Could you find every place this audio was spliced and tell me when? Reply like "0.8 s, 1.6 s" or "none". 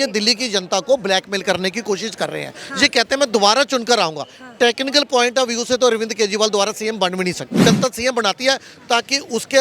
7.6 s